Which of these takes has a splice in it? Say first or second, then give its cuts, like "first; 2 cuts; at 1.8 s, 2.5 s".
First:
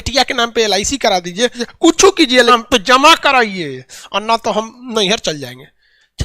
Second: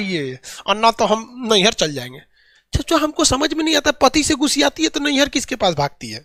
first; 2 cuts; at 1.6 s, 2.5 s